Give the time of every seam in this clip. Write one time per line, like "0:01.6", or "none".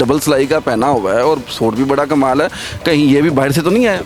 none